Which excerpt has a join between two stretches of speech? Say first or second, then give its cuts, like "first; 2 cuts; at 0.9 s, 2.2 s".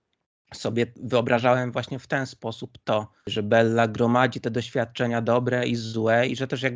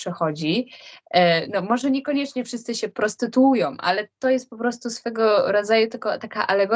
first; 2 cuts; at 1.0 s, 3.3 s